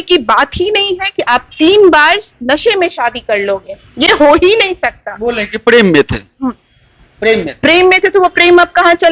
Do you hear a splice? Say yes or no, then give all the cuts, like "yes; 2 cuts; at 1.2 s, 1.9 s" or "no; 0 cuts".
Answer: no; 0 cuts